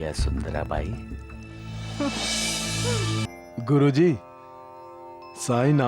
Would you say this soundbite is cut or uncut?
cut